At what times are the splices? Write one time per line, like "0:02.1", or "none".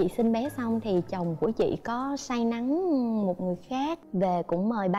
0:04.0